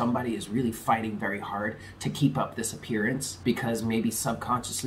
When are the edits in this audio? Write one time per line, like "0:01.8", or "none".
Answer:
0:03.3